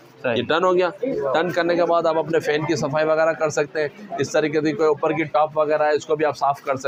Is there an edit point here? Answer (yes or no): no